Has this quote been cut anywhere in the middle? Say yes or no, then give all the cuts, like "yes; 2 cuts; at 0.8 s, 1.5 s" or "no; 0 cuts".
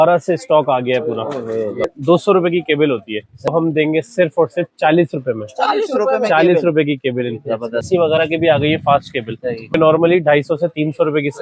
yes; 4 cuts; at 1.9 s, 3.5 s, 7.8 s, 9.8 s